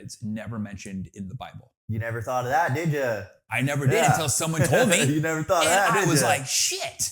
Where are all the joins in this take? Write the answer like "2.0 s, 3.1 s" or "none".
1.7 s